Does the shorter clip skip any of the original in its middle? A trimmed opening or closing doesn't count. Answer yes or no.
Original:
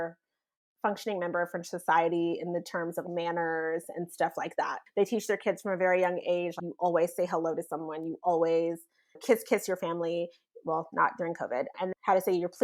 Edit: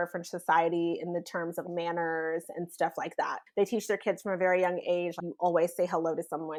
no